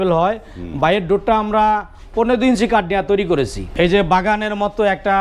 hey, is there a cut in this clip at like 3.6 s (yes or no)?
yes